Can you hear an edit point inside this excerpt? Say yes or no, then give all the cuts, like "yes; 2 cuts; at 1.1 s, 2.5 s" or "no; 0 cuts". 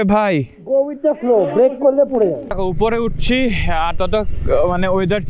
yes; 1 cut; at 2.5 s